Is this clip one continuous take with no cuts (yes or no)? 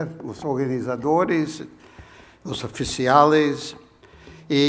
no